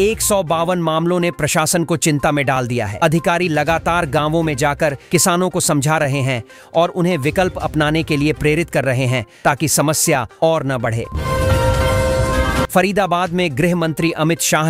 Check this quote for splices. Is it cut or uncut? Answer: cut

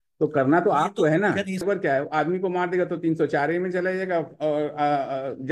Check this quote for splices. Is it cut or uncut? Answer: cut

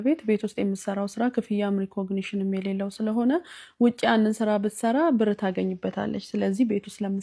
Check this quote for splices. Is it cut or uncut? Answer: uncut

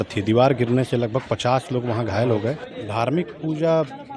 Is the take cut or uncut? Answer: cut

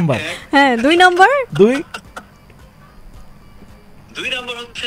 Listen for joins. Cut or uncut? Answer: uncut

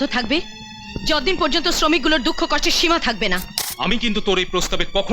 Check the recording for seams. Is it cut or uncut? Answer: cut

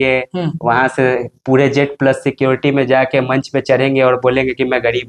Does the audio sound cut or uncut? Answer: uncut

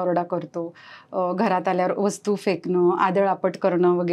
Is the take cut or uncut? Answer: uncut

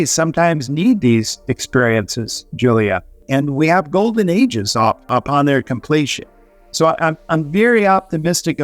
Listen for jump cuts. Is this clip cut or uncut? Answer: cut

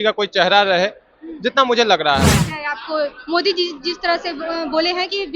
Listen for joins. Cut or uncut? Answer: cut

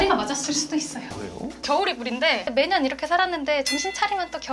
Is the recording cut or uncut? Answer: cut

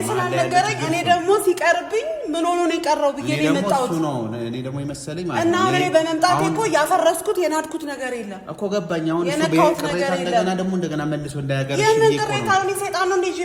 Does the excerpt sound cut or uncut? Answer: uncut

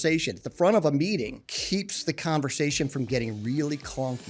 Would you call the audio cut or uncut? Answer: cut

